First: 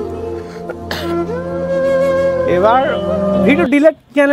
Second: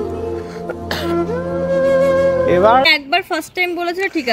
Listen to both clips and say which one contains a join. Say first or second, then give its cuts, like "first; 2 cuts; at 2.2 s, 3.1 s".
second; 1 cut; at 2.9 s